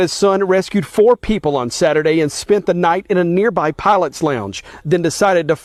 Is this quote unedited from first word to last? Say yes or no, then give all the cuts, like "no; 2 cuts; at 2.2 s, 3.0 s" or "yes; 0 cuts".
yes; 0 cuts